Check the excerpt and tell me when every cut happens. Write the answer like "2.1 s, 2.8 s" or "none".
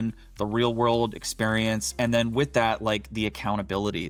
none